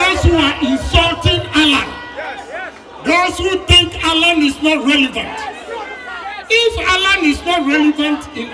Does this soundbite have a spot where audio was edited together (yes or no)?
no